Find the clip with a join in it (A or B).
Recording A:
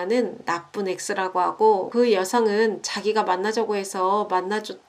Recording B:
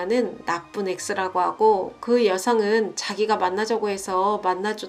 A